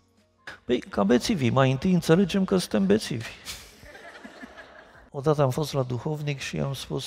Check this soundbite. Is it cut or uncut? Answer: cut